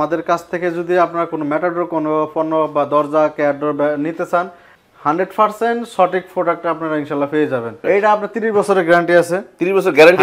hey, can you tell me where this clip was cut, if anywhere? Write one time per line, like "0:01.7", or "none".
0:07.8